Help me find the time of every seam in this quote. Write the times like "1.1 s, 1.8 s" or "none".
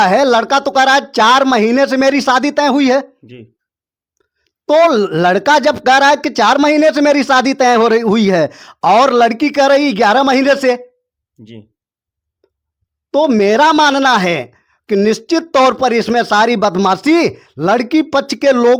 none